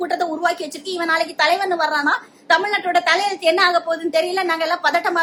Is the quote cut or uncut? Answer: uncut